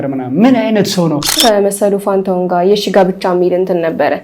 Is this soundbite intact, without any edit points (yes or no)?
no